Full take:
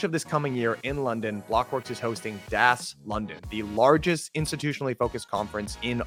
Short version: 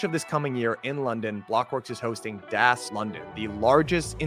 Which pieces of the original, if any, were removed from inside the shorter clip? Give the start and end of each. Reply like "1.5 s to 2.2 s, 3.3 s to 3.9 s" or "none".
2.9 s to 3.0 s